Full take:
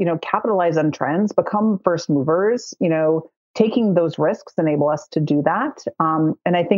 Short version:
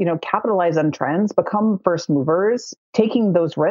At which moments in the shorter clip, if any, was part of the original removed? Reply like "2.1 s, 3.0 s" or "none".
2.7 s